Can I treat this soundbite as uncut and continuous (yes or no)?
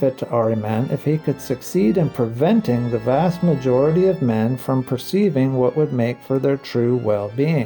yes